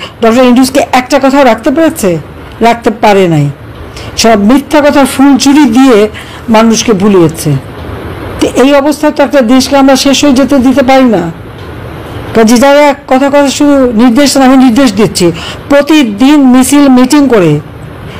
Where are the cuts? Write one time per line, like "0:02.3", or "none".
none